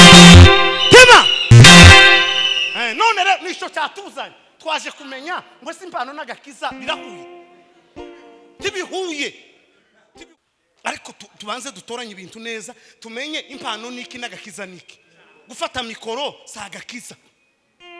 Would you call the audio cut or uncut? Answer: cut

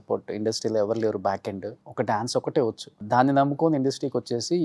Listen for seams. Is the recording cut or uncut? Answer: cut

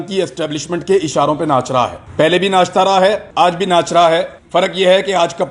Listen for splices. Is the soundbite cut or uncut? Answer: cut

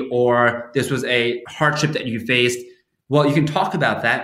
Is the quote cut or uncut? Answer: cut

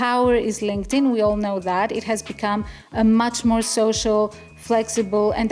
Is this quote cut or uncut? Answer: uncut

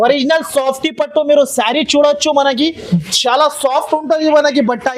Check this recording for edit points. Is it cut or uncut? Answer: uncut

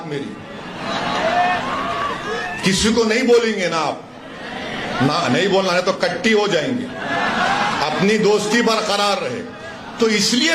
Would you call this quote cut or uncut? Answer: uncut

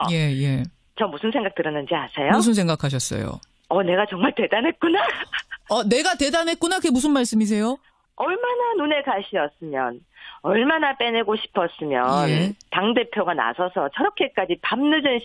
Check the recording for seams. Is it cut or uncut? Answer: cut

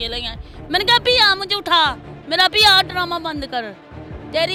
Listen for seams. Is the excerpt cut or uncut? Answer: uncut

